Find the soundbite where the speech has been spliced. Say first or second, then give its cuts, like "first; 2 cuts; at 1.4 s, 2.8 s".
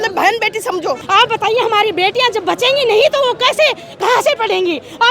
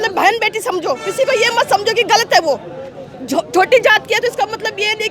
first; 1 cut; at 1.0 s